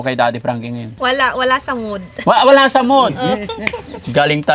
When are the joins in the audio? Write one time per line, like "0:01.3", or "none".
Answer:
0:01.0